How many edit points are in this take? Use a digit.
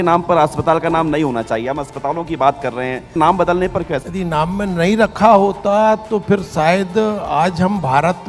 2